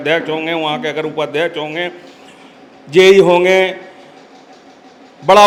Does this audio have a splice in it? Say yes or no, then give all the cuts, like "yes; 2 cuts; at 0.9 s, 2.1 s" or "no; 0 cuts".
no; 0 cuts